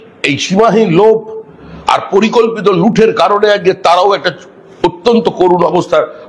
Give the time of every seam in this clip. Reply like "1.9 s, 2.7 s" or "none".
none

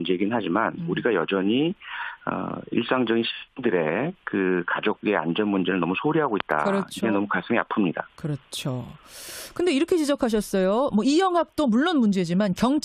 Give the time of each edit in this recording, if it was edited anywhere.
10.7 s

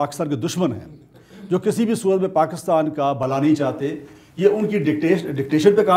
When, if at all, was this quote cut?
none

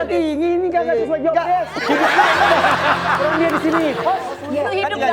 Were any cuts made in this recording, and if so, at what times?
4.2 s

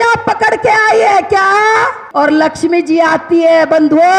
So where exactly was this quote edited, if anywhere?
2.0 s

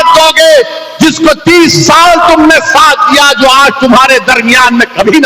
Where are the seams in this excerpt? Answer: none

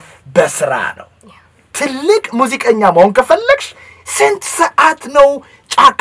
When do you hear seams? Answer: none

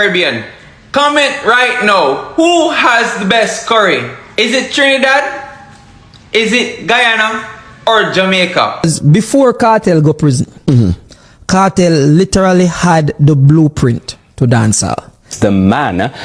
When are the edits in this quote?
8.9 s, 15.3 s

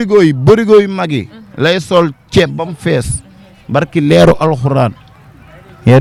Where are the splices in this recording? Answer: none

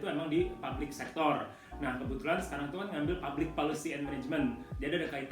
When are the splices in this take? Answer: none

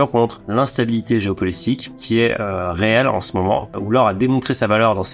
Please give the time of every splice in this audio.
3.7 s

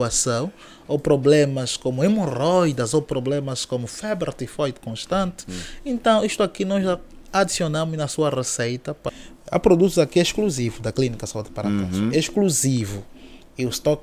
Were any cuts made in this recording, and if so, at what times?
9.1 s

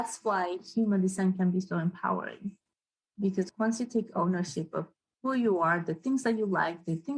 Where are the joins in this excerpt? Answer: 3.5 s

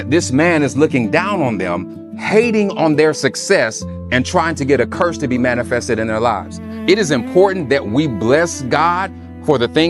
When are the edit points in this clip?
6.7 s

